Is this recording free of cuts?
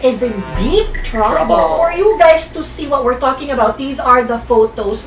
no; 1 cut; at 1.8 s

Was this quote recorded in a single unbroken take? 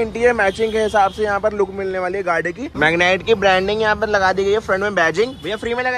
no; 1 cut; at 2.7 s

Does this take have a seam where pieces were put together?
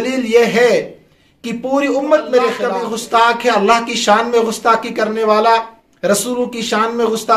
yes; 1 cut; at 2.7 s

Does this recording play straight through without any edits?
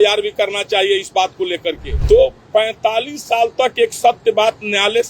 no; 1 cut; at 1.9 s

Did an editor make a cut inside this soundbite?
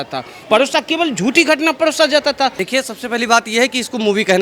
yes; 1 cut; at 2.6 s

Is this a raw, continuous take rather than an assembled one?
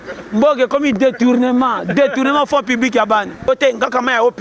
no; 1 cut; at 3.5 s

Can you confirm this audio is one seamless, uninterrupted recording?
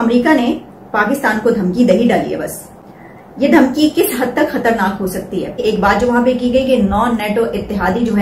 no; 1 cut; at 5.6 s

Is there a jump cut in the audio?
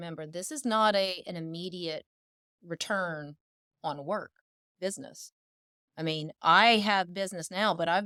no; 0 cuts

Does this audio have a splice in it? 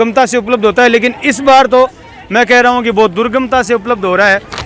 no; 0 cuts

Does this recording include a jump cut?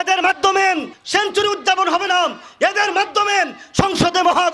yes; 1 cut; at 0.9 s

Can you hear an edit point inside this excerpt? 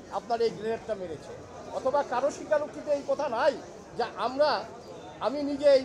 no; 0 cuts

